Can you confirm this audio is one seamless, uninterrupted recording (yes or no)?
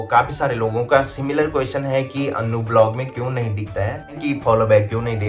no